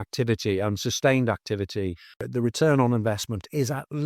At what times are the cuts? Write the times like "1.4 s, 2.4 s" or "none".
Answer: 2.2 s

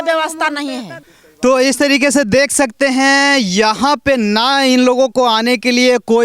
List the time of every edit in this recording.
none

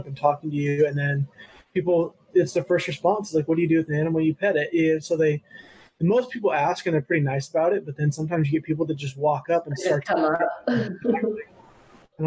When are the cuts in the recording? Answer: none

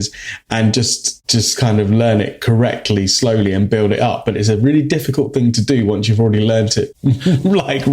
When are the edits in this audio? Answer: 6.9 s

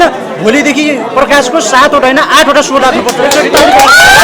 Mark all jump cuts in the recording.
3.1 s

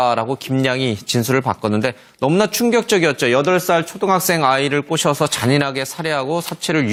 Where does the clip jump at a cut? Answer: none

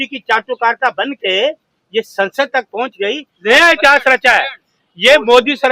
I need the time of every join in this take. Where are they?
3.3 s

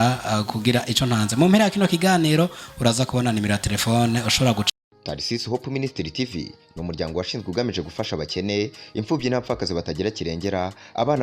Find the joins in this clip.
4.7 s

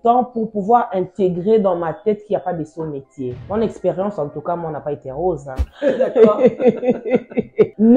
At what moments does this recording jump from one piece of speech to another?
3.4 s, 5.7 s

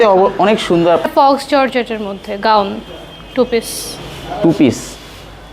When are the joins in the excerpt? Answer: 1.1 s

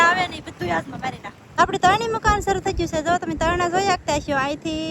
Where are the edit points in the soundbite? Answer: none

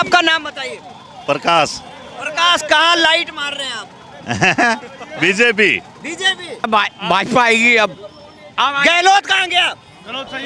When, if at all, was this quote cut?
6.7 s

